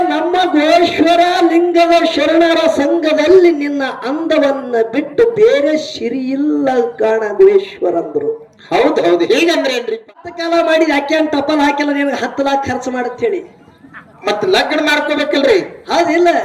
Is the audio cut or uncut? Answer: cut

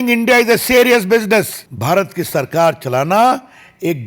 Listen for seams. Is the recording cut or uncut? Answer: cut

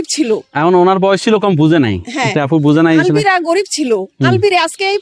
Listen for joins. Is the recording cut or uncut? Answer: uncut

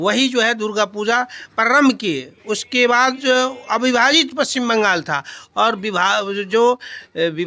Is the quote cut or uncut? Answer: uncut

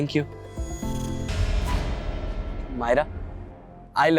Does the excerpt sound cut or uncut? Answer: cut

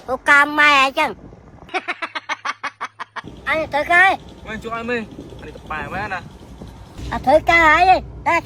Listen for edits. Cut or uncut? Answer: uncut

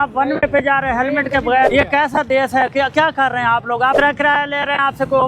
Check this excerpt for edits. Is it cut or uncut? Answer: cut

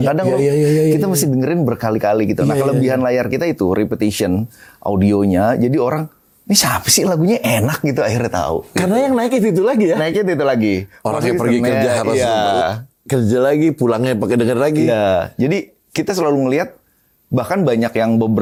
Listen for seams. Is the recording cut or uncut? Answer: uncut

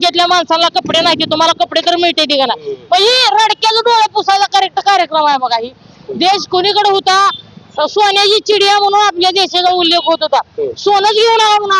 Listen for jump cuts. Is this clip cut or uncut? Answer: uncut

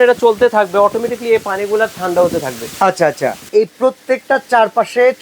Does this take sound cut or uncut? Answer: cut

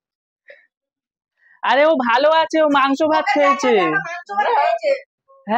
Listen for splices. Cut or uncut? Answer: uncut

